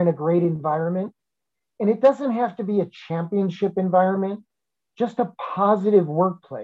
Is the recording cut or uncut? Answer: uncut